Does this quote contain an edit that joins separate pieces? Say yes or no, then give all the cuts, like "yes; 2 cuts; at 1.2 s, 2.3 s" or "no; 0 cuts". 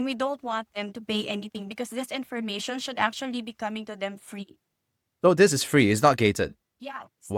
no; 0 cuts